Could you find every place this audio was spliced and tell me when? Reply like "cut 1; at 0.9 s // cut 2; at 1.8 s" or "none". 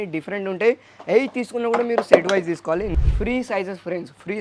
cut 1; at 2.9 s